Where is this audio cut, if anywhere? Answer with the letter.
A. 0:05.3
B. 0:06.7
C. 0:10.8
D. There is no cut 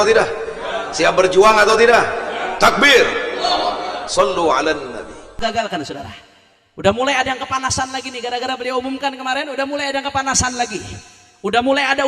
A